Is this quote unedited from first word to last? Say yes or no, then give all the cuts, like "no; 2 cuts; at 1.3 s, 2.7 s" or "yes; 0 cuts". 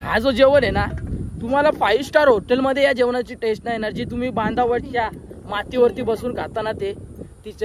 yes; 0 cuts